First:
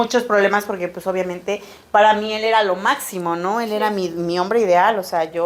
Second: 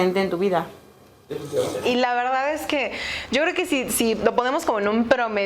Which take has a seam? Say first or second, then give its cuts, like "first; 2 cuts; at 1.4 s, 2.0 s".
second; 1 cut; at 1.8 s